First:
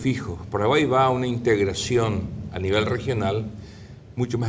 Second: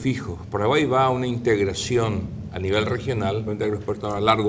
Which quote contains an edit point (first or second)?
first